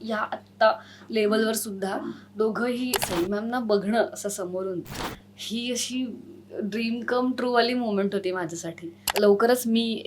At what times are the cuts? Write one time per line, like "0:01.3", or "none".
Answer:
0:03.0
0:09.0